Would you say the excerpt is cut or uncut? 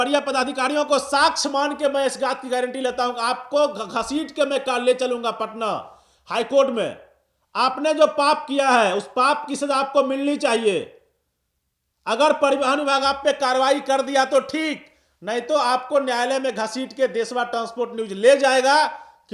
uncut